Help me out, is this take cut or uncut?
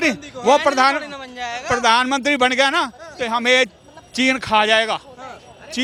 uncut